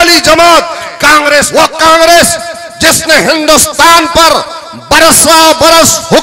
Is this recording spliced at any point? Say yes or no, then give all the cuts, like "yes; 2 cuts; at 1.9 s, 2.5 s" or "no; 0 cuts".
yes; 1 cut; at 1.5 s